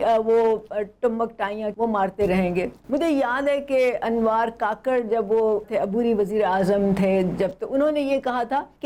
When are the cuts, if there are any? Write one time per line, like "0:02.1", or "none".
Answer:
none